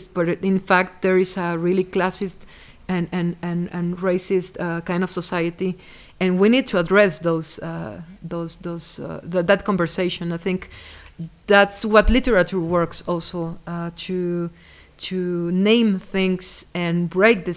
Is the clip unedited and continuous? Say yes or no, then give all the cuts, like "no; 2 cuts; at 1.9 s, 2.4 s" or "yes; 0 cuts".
yes; 0 cuts